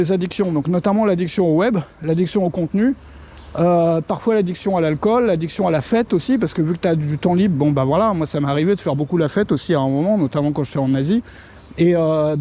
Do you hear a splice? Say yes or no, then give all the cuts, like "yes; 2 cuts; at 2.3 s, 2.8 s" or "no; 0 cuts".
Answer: no; 0 cuts